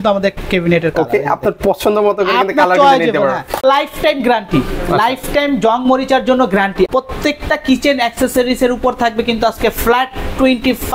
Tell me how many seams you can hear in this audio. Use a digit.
2